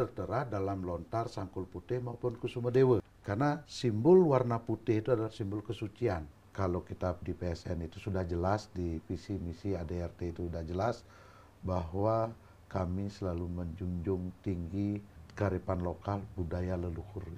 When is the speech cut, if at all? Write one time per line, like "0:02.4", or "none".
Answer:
0:03.2
0:06.4
0:15.2